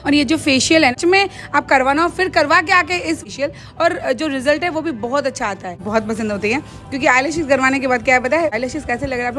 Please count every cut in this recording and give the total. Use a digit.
4